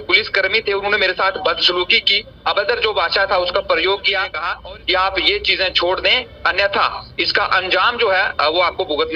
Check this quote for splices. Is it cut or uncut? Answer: cut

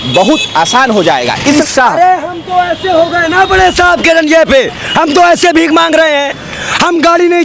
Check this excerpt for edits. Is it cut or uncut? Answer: cut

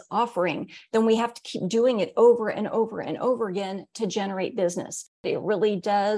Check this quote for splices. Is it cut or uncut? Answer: cut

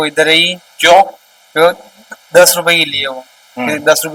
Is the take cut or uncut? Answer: uncut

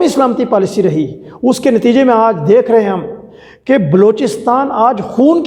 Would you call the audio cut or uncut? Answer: uncut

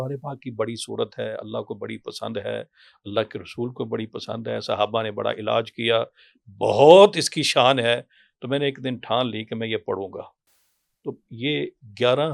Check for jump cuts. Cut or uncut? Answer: uncut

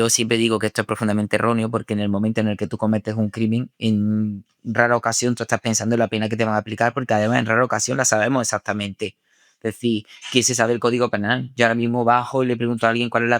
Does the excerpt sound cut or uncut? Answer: uncut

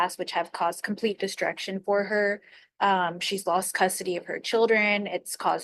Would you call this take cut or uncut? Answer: uncut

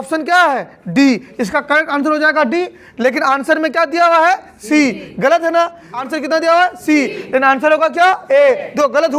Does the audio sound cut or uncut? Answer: cut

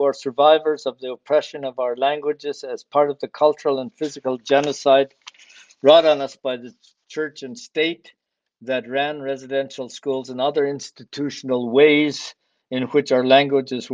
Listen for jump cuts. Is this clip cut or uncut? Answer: uncut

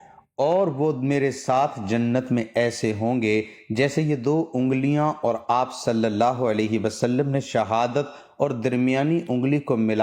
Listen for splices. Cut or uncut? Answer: cut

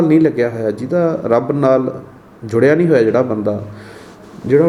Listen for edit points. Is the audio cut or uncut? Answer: uncut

